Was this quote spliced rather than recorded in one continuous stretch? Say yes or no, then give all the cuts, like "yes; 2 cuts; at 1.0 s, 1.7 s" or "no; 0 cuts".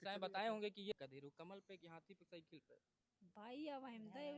yes; 1 cut; at 0.9 s